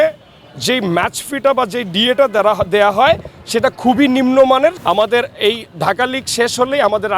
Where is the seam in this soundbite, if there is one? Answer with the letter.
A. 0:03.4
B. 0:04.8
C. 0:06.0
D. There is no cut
B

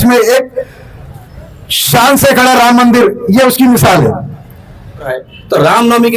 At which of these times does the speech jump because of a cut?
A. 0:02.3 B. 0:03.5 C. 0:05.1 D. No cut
C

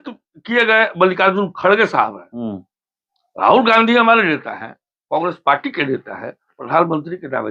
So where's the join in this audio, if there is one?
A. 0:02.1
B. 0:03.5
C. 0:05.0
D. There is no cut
D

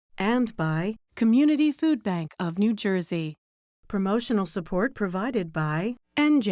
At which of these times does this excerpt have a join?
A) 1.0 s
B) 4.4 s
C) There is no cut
A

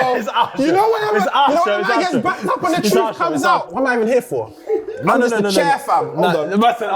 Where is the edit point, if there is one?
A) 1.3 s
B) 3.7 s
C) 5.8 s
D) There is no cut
B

